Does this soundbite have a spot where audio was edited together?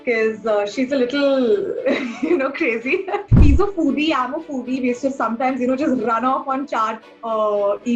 yes; 1 cut; at 3.3 s

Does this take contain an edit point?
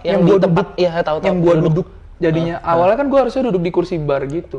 no; 0 cuts

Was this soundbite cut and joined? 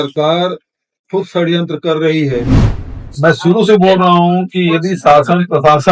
yes; 1 cut; at 2.9 s

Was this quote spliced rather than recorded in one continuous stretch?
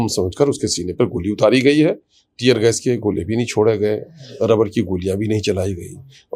no; 0 cuts

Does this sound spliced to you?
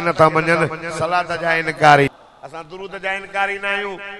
yes; 1 cut; at 2.1 s

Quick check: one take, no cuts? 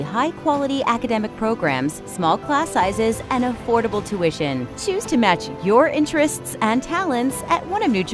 yes; 0 cuts

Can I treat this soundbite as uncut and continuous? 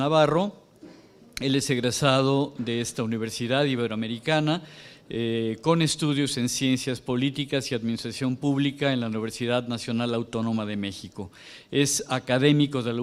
yes; 0 cuts

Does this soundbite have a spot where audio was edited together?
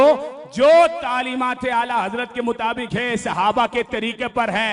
no; 0 cuts

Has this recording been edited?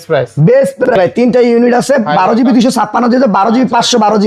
yes; 1 cut; at 0.9 s

